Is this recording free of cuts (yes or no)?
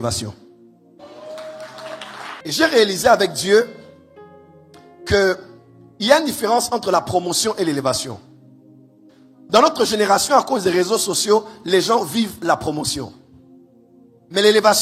no